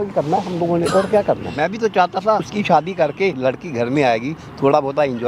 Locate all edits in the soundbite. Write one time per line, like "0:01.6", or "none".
0:01.5
0:02.5
0:03.4